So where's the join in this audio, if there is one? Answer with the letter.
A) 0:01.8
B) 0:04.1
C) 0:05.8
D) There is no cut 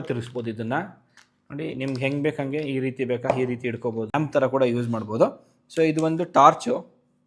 B